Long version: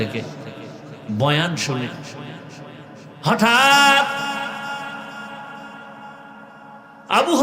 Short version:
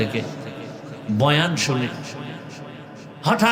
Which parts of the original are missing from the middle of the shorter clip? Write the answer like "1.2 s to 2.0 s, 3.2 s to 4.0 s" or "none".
none